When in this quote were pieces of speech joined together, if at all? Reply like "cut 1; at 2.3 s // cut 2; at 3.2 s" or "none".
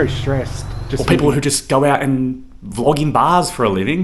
cut 1; at 1.0 s